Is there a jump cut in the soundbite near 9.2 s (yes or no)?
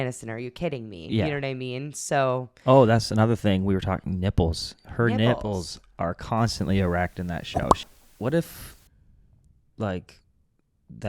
no